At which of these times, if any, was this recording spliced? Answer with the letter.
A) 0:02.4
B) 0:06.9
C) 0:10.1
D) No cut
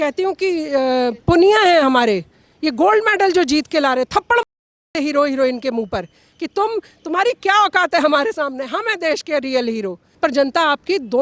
C